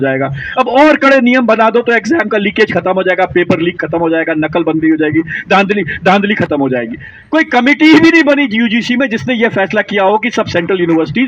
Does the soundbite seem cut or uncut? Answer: cut